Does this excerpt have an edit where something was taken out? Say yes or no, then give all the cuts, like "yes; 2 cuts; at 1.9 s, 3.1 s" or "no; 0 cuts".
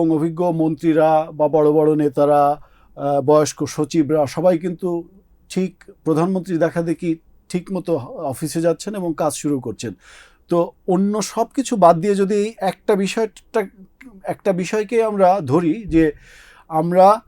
no; 0 cuts